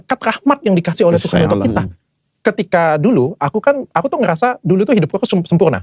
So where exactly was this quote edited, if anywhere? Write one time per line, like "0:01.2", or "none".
0:02.0